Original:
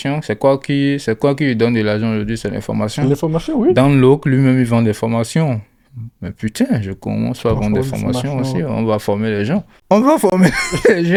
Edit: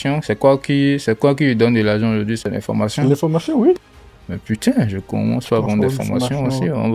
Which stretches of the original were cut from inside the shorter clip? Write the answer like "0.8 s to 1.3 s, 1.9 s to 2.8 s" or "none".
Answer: 3.7 s to 5.7 s